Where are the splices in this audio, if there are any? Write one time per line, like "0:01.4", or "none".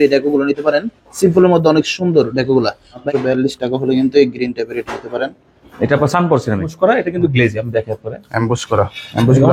0:02.9
0:06.7